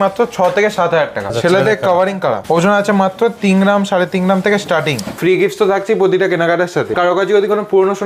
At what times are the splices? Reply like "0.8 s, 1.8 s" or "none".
1.3 s, 2.4 s, 5.2 s, 6.9 s